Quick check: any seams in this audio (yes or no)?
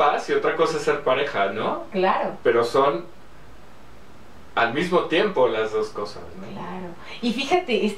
no